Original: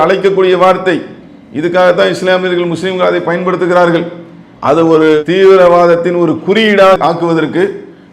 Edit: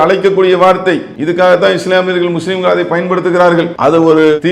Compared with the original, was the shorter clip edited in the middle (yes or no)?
yes